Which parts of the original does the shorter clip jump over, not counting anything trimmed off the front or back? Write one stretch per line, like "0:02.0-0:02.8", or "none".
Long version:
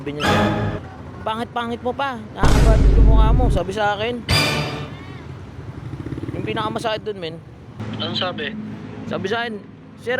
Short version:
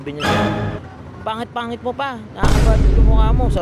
none